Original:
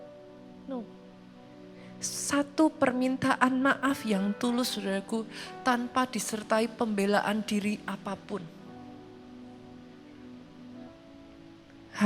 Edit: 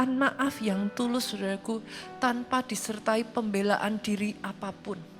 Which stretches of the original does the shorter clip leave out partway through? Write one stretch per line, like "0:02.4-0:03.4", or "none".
none